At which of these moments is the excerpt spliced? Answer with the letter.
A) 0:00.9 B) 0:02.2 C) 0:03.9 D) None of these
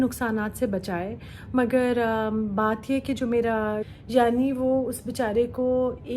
C